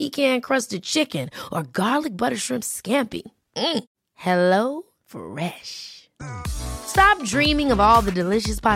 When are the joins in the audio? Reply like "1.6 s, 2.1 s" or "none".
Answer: none